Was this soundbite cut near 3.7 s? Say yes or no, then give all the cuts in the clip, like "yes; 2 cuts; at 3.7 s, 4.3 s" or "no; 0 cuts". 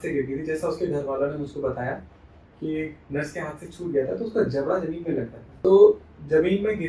no; 1 cut; at 5.4 s